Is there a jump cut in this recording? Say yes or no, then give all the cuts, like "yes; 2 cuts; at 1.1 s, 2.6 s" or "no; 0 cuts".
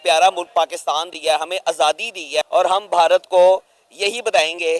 yes; 1 cut; at 2.4 s